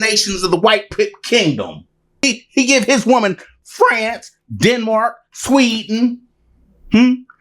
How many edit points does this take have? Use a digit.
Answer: 1